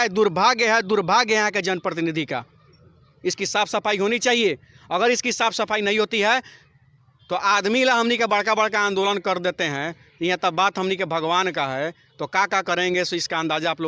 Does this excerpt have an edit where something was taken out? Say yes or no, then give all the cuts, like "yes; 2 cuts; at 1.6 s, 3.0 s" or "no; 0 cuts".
no; 0 cuts